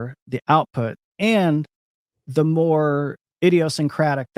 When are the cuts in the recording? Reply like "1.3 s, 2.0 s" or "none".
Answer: 3.2 s